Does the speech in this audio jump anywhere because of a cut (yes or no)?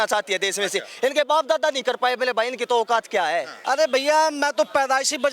yes